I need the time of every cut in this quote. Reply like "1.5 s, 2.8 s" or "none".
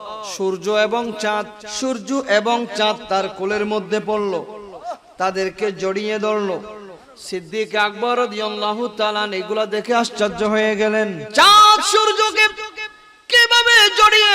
1.6 s, 11.2 s

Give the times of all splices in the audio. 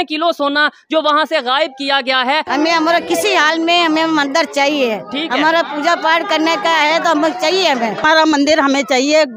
2.5 s, 8.0 s

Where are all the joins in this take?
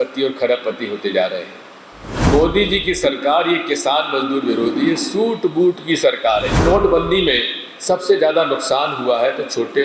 2.3 s, 6.6 s

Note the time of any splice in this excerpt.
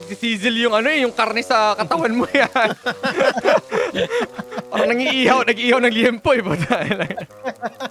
none

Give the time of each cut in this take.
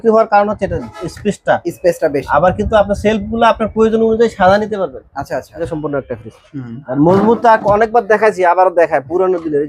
5.8 s

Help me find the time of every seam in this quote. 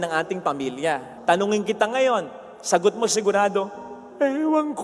1.1 s

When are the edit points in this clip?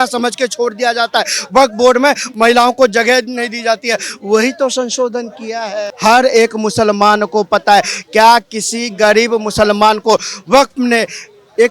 5.9 s

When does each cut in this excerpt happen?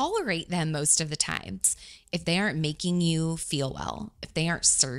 1.8 s

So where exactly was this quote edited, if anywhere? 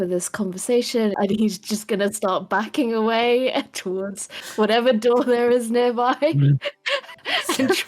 1.1 s

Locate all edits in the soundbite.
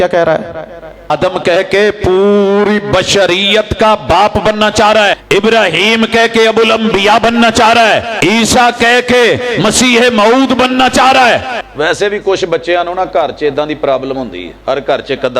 1.1 s, 5.2 s, 8.1 s, 11.6 s, 14.4 s

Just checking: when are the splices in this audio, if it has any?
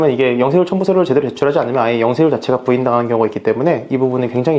none

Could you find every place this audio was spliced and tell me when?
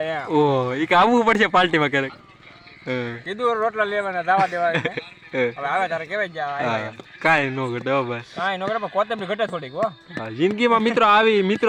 none

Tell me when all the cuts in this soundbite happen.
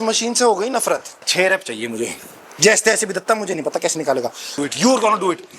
1.3 s, 4.6 s

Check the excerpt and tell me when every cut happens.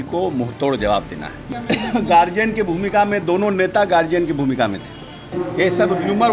1.5 s, 5.3 s

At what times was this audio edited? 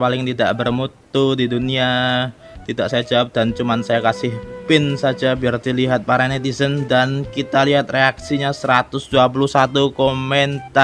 none

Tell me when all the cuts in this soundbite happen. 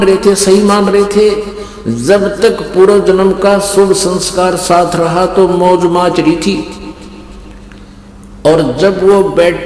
none

